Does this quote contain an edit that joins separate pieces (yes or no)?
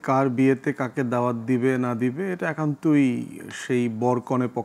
no